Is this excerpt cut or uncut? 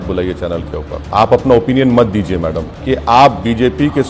cut